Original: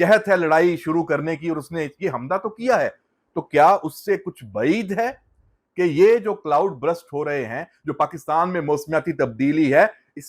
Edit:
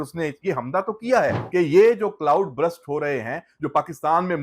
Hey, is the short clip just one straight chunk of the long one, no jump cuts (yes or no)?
no